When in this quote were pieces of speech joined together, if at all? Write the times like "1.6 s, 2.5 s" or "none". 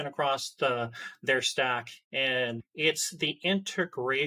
2.7 s